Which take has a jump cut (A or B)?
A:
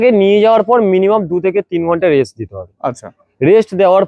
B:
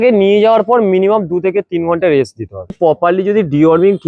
B